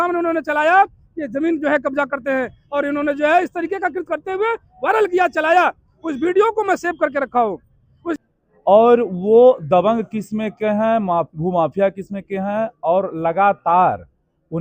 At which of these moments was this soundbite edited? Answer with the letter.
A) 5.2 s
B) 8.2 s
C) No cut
B